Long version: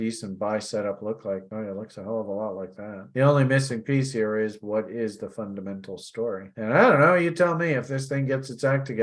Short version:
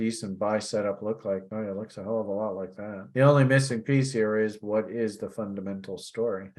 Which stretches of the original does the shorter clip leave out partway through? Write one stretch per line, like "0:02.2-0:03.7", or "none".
none